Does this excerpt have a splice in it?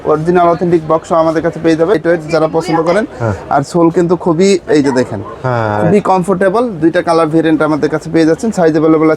yes; 1 cut; at 2.0 s

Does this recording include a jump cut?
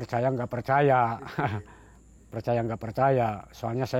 no; 0 cuts

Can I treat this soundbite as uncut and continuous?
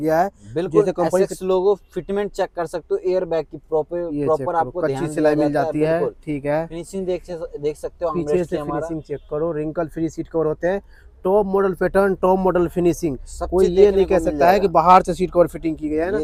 yes; 0 cuts

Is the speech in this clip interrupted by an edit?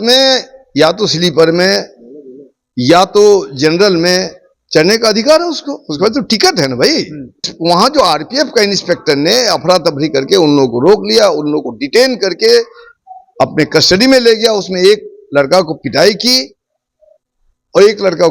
yes; 1 cut; at 7.5 s

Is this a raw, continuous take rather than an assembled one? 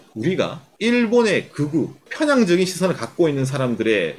no; 1 cut; at 2.0 s

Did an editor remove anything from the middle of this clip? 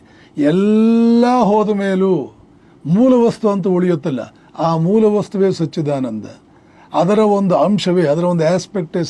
no; 0 cuts

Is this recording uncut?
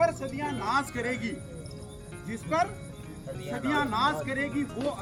yes; 0 cuts

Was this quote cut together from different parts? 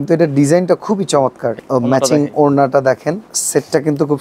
yes; 2 cuts; at 1.6 s, 3.3 s

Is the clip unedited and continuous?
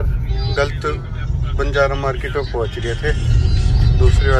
yes; 0 cuts

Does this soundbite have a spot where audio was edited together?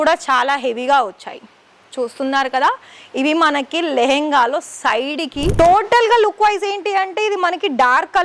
yes; 1 cut; at 5.5 s

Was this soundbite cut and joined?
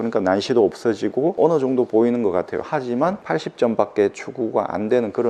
no; 0 cuts

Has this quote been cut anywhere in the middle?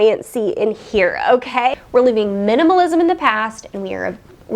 yes; 1 cut; at 1.7 s

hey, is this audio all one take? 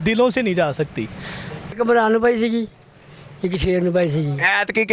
no; 1 cut; at 1.7 s

